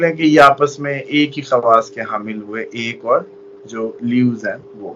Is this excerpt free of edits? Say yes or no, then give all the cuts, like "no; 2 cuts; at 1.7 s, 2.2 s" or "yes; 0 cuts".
yes; 0 cuts